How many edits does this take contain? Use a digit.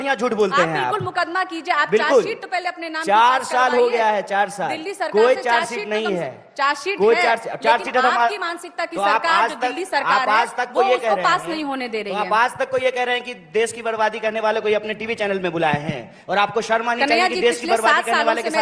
0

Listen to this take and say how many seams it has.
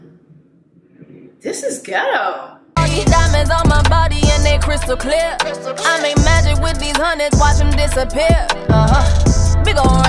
1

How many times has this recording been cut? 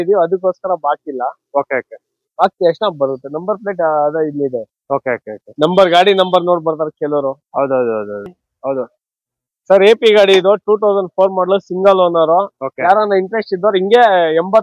1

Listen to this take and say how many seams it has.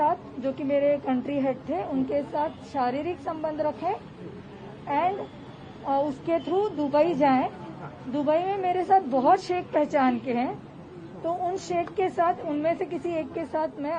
0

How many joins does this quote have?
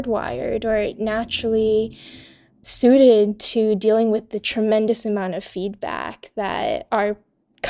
1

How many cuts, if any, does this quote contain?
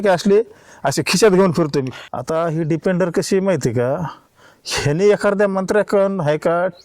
1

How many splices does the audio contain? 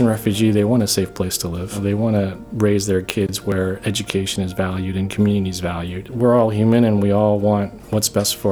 2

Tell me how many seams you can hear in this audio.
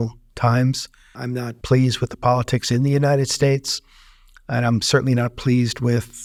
0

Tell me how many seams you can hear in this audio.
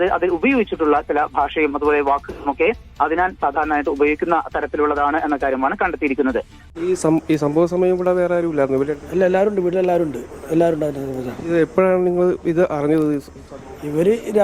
1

